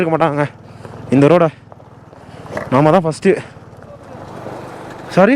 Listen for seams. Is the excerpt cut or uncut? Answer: cut